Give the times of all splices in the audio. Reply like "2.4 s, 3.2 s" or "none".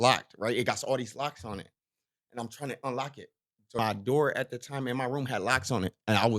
3.8 s